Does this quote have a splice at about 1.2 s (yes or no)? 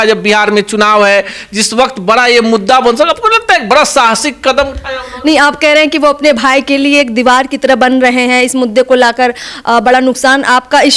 no